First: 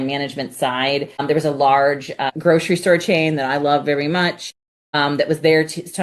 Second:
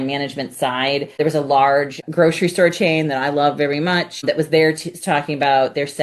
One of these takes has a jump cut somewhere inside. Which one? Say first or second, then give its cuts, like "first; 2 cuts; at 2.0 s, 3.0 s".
second; 3 cuts; at 1.1 s, 2.0 s, 4.2 s